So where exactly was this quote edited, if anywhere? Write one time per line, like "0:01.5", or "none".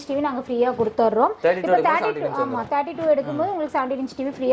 none